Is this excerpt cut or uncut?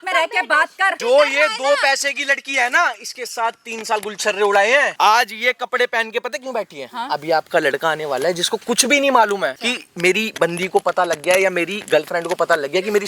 cut